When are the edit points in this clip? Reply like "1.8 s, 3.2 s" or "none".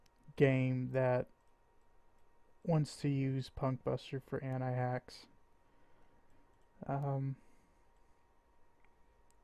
7.5 s

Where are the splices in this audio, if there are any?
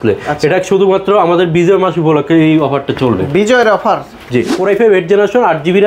4.5 s

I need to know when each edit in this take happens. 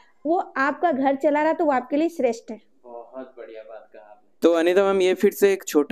none

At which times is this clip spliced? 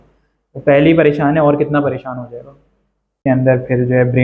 3.2 s

